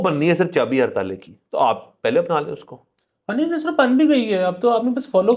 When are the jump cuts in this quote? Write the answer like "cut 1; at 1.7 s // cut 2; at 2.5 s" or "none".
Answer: none